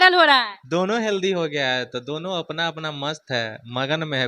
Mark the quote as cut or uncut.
uncut